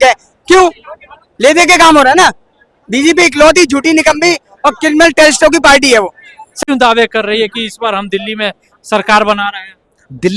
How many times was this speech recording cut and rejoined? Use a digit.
0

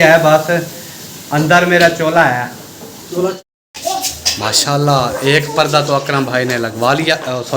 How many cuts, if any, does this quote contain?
1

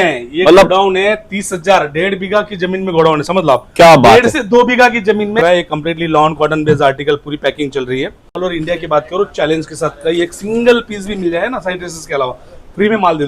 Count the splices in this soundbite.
2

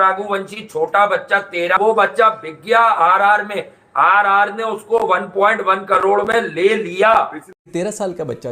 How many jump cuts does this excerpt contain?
2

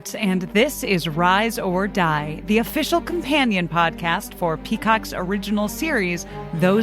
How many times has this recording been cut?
0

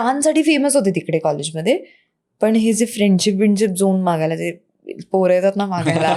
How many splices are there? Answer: 0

